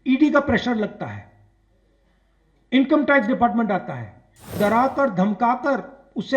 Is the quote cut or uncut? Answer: cut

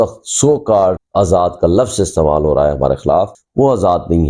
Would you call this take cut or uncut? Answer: cut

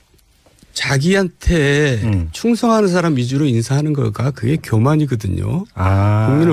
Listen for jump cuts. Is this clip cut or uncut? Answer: uncut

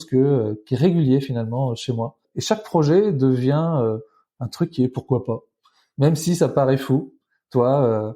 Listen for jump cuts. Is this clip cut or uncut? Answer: cut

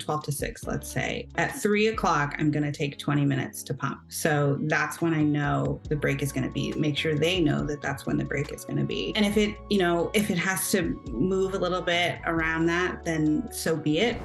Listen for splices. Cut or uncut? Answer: uncut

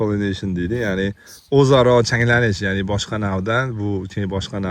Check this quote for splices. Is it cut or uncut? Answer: uncut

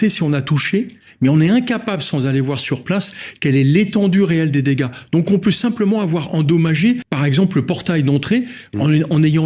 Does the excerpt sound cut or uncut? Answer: cut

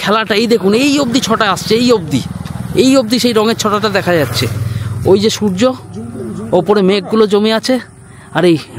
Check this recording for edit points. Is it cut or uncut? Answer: uncut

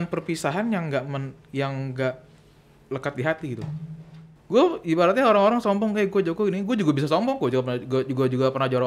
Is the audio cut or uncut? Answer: cut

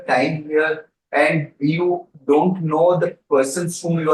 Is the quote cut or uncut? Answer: uncut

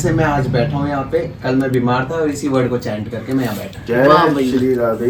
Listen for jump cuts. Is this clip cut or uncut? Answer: uncut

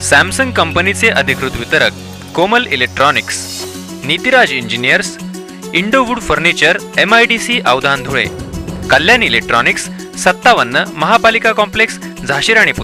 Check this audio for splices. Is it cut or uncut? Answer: uncut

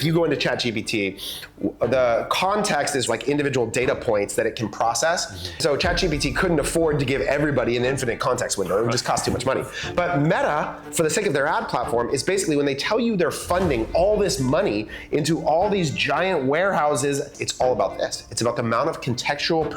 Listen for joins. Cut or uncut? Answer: cut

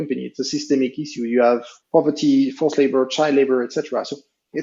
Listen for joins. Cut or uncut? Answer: cut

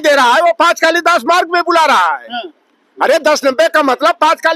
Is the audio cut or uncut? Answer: uncut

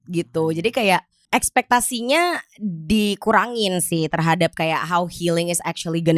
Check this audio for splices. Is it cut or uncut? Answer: cut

